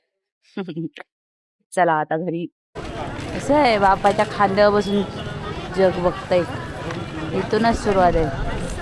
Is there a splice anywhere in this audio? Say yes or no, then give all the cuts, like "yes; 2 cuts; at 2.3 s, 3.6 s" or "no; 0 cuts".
no; 0 cuts